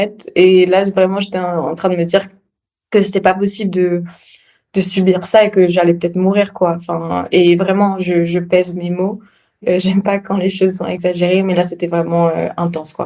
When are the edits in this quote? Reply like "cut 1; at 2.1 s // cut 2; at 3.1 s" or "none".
cut 1; at 9.6 s // cut 2; at 10.9 s

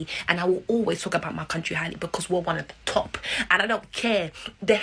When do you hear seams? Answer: none

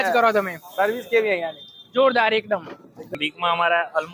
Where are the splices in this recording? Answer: cut 1; at 3.1 s

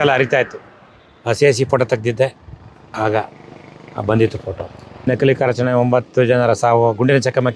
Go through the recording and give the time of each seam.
cut 1; at 5.1 s

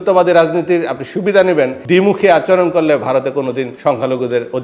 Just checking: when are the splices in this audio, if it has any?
cut 1; at 1.8 s // cut 2; at 3.7 s

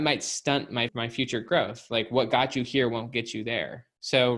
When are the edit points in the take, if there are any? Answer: cut 1; at 0.9 s

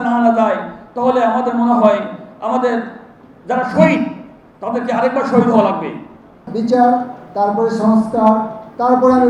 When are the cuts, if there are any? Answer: cut 1; at 6.5 s

